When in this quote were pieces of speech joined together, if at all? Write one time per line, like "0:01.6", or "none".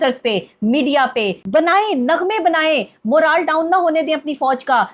0:01.4